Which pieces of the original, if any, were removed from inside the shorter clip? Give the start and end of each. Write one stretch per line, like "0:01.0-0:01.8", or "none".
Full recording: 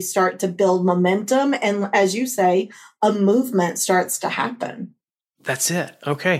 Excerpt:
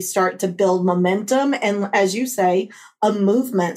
none